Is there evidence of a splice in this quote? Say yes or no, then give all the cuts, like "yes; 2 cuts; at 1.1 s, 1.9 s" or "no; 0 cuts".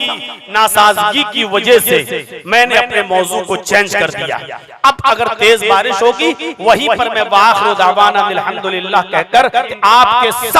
yes; 1 cut; at 9.7 s